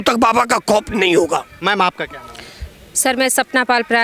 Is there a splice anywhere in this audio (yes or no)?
no